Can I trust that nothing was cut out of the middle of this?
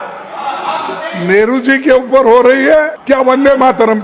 no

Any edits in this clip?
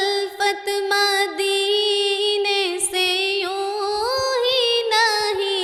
no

